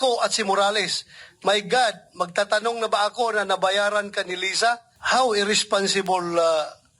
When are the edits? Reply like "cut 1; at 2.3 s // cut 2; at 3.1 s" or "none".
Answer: cut 1; at 4.9 s

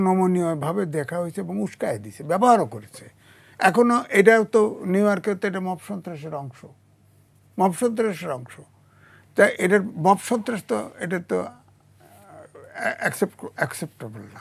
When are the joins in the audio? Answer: none

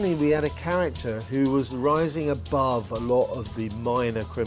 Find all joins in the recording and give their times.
none

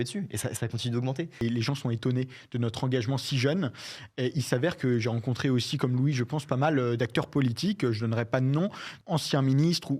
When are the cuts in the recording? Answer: cut 1; at 1.4 s // cut 2; at 8.9 s

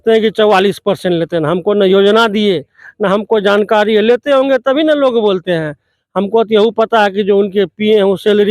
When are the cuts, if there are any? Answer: none

